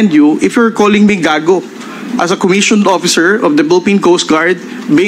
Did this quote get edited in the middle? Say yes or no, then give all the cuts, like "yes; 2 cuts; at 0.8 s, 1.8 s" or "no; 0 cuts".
no; 0 cuts